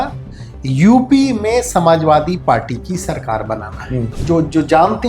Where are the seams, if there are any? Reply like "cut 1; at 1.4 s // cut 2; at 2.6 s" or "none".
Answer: cut 1; at 4.2 s